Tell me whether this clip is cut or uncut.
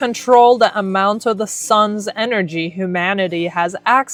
uncut